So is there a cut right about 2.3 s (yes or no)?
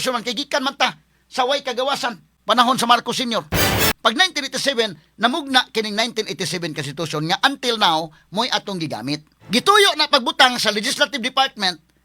yes